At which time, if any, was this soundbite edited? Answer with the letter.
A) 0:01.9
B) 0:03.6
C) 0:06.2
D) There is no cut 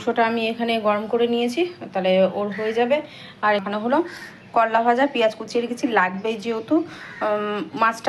B